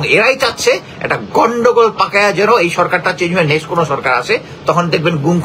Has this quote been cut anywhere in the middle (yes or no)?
no